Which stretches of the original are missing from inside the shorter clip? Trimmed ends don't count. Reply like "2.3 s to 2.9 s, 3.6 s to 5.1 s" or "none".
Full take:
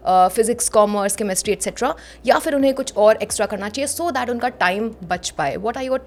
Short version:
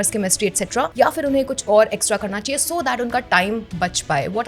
2.0 s to 2.2 s